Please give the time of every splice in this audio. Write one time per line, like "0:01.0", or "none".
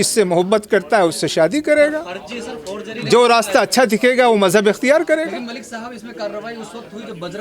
none